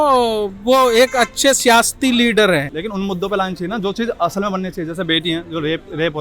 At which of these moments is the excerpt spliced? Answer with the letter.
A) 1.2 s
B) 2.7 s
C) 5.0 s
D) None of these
B